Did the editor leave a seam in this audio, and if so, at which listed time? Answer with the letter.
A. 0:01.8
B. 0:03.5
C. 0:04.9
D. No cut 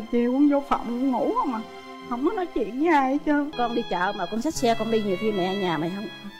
B